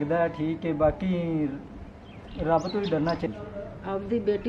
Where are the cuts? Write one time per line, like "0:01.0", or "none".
0:03.2